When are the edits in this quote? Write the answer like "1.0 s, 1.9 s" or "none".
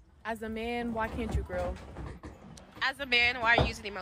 2.4 s